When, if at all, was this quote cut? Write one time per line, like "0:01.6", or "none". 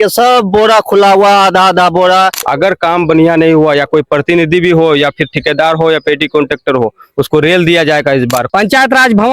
0:02.4
0:08.4